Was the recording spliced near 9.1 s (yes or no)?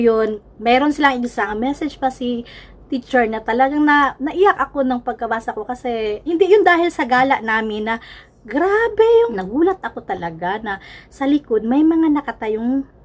yes